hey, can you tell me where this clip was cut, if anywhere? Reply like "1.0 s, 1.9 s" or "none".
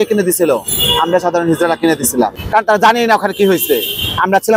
2.4 s